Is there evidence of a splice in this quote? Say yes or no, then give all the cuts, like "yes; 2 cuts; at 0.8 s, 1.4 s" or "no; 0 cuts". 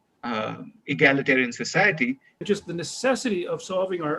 yes; 1 cut; at 2.4 s